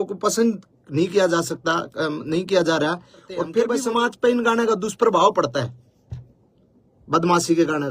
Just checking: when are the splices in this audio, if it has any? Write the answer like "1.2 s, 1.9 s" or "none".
3.6 s

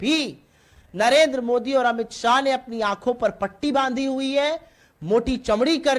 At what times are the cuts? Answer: none

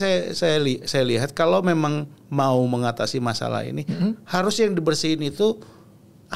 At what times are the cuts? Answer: none

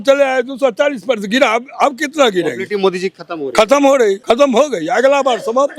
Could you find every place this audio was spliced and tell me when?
4.2 s

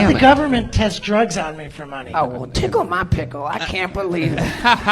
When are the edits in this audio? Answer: 2.0 s

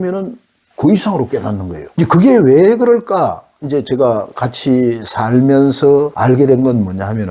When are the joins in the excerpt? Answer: 1.8 s, 6.1 s

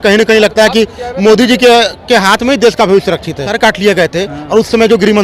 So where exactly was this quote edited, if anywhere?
3.5 s

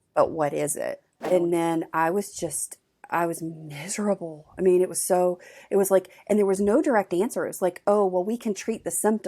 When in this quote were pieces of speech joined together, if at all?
1.1 s

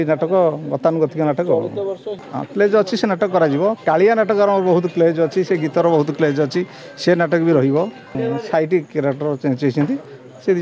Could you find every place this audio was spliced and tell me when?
2.2 s, 8.2 s

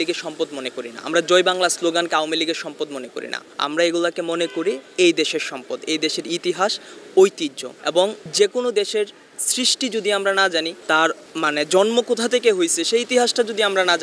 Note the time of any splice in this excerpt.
none

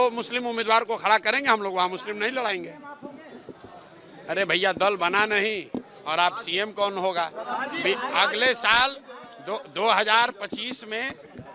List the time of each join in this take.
none

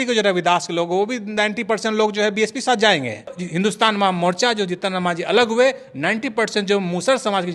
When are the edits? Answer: 3.4 s

